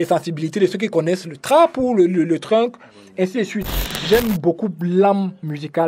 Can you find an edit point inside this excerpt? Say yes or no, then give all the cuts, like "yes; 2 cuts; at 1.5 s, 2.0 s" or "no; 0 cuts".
yes; 1 cut; at 3.8 s